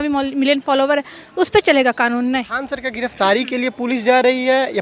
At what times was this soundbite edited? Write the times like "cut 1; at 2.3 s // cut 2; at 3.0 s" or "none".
cut 1; at 2.5 s